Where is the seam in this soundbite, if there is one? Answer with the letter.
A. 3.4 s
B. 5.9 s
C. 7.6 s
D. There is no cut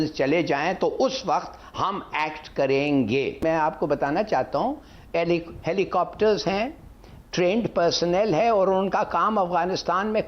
A